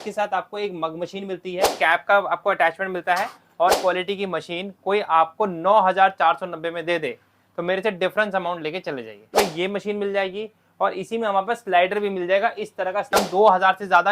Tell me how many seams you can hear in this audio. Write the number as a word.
four